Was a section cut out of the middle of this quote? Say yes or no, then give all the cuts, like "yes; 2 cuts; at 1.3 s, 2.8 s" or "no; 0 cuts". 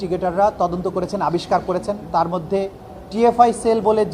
no; 0 cuts